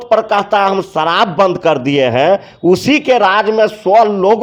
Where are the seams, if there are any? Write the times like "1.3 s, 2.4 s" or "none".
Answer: none